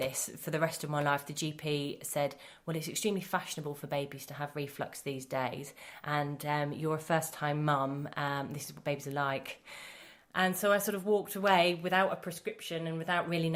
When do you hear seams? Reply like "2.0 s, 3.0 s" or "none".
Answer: none